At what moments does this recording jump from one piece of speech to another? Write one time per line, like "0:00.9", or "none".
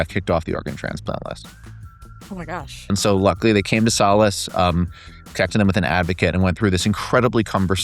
0:02.8